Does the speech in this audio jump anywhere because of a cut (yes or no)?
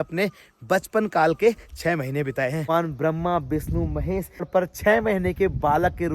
yes